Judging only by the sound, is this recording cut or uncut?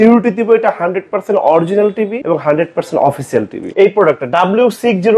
cut